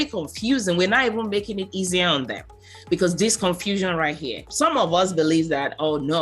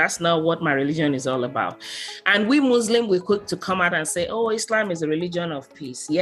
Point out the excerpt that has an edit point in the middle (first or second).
first